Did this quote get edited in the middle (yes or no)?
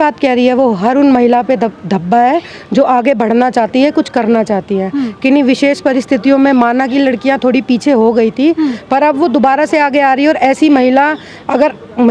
no